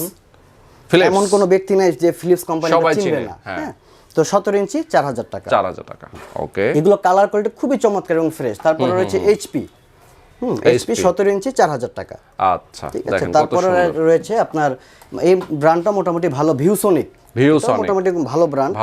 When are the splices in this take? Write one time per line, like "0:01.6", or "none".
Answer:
none